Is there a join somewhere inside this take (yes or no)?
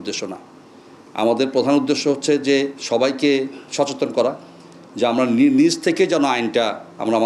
no